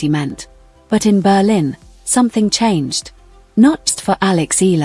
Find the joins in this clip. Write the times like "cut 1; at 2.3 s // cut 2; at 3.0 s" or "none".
cut 1; at 3.9 s